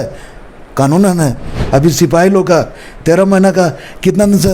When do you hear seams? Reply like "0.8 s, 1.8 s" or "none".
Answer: 1.5 s